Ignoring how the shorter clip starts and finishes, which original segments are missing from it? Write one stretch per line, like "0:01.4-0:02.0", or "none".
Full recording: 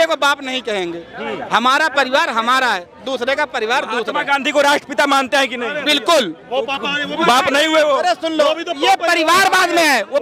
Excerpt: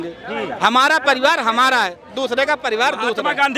none